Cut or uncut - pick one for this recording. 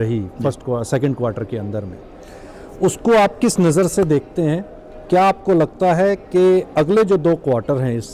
uncut